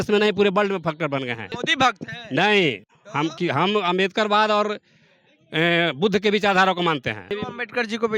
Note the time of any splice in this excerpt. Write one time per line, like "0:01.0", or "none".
0:01.6
0:07.3